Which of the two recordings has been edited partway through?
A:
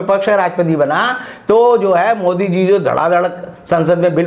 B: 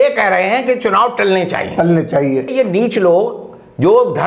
B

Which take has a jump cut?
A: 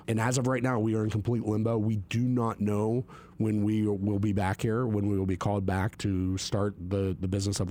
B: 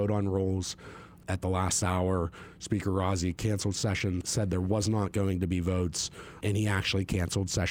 B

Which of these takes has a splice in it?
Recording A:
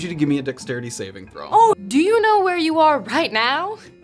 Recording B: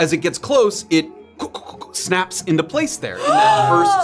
A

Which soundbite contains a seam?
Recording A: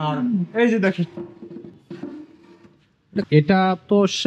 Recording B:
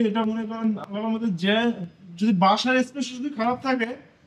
A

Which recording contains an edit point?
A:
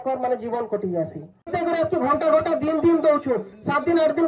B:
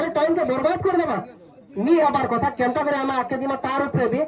A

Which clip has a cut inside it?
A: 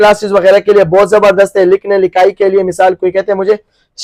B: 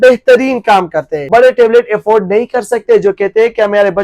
B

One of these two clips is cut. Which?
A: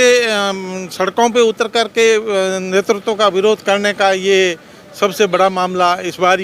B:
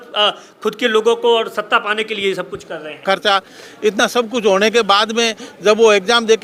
B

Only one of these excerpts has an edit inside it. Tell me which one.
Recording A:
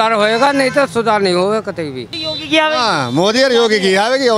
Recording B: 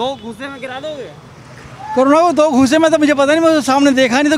A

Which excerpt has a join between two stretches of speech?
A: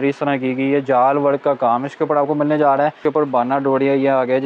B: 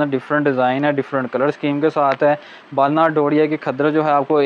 A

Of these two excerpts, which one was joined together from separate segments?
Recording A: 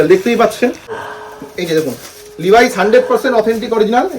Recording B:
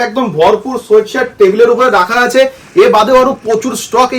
A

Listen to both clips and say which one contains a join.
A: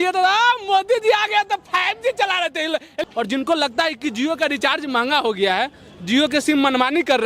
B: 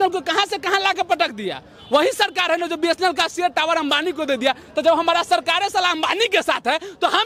A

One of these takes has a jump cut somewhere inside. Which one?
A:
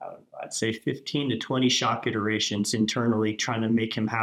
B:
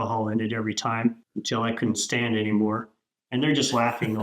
B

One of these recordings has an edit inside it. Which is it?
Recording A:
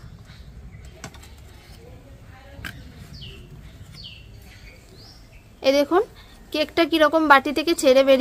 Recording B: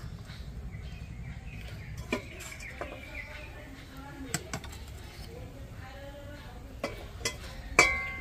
A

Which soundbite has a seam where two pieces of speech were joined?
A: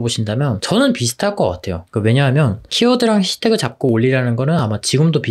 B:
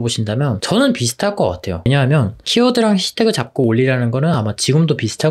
B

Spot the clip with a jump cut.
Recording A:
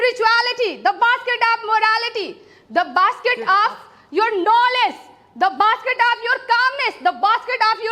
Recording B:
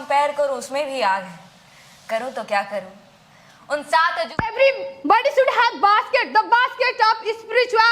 B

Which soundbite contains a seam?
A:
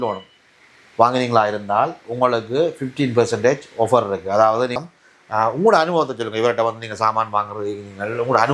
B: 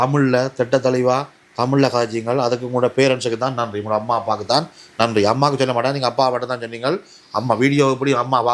A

